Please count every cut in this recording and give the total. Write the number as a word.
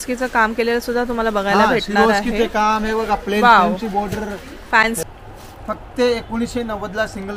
one